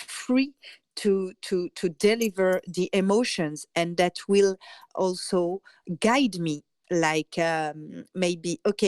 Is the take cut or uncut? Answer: cut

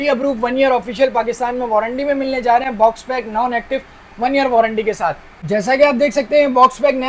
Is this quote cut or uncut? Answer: uncut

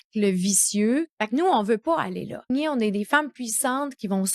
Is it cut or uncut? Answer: cut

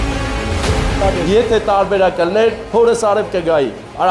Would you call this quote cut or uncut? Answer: cut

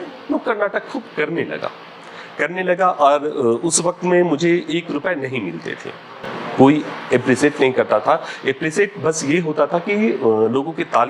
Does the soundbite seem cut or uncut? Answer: uncut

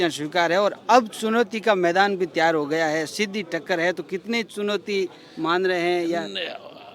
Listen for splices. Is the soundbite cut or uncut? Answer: uncut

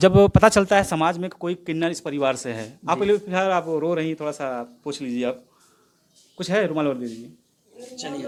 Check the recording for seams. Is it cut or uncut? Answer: uncut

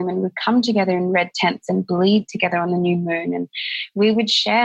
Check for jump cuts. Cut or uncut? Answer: uncut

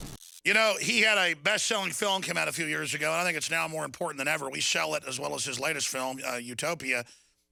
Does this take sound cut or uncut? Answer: uncut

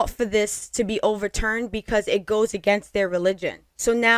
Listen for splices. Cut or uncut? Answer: uncut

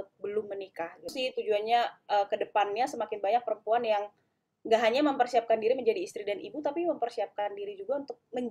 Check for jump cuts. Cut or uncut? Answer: cut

